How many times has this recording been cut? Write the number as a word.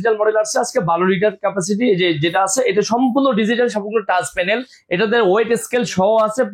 zero